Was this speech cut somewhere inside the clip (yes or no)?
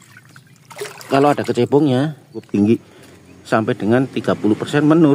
yes